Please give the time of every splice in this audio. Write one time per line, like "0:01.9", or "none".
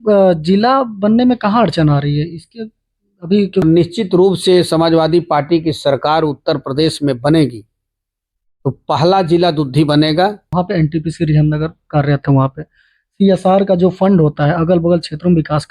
0:03.6
0:10.4